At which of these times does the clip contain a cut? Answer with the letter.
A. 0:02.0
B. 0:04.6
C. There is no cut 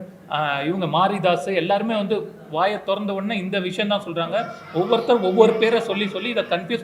C